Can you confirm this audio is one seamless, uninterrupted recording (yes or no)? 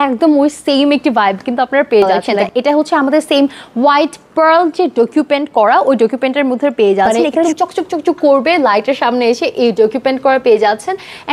no